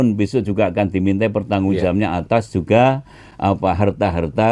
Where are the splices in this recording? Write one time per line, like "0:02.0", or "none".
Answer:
none